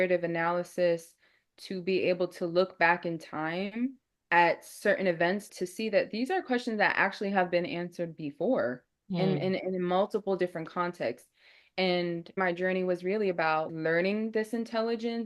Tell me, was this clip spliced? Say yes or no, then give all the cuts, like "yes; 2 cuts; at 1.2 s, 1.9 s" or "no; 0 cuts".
yes; 1 cut; at 5.5 s